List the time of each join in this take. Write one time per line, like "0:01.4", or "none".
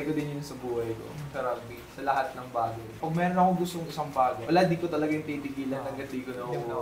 0:01.3
0:03.0
0:04.4

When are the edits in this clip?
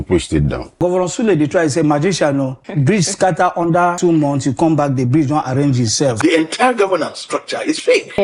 0:00.8
0:04.0
0:06.2

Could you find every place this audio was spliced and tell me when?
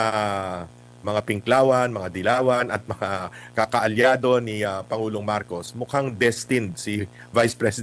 none

